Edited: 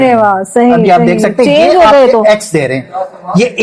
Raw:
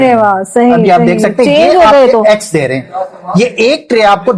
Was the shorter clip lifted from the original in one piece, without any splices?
yes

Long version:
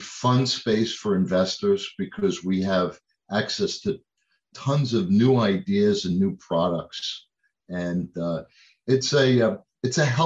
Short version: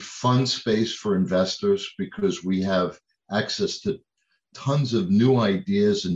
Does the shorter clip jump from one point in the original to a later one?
no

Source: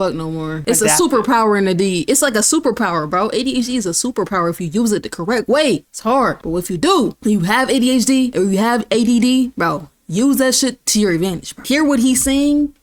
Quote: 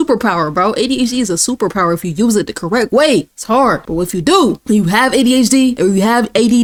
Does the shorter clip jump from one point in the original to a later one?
no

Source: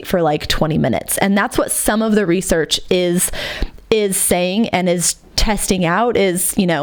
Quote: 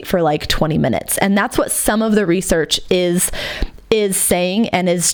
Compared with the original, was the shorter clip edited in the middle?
no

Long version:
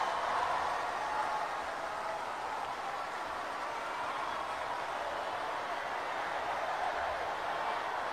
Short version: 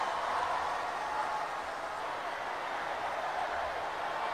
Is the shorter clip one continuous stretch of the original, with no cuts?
no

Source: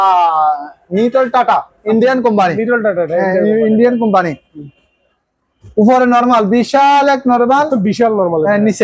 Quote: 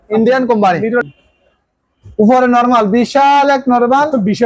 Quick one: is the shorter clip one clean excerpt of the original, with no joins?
no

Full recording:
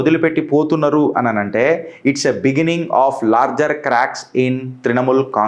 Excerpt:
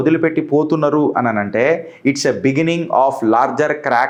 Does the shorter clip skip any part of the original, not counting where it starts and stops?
no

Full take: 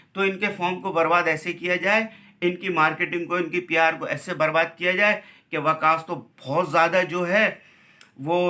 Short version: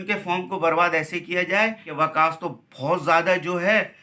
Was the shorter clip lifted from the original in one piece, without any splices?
no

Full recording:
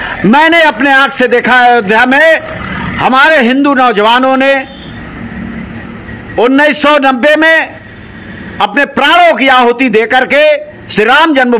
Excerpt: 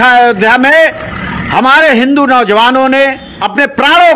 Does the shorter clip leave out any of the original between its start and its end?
yes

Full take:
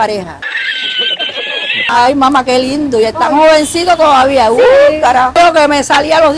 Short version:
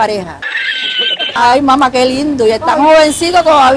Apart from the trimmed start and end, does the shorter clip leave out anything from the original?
yes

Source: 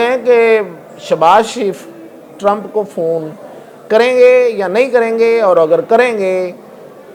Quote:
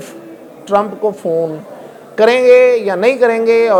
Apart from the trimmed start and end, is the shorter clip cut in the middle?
no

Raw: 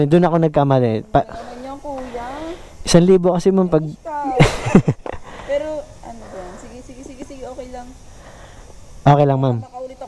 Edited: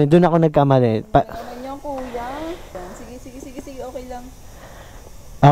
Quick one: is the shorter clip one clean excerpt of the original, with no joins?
no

